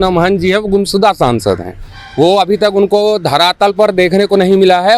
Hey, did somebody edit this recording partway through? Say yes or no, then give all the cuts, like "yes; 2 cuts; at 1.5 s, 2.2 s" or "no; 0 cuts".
no; 0 cuts